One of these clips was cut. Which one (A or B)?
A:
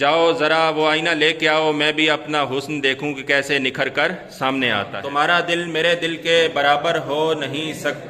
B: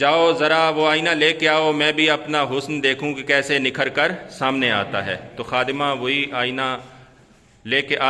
A